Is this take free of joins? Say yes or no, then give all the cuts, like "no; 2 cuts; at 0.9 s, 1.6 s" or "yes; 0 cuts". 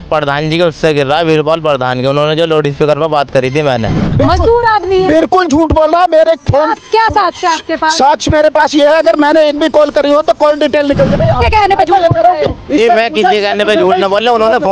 no; 2 cuts; at 4.0 s, 11.2 s